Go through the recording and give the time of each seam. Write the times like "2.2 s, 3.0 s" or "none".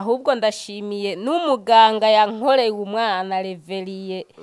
none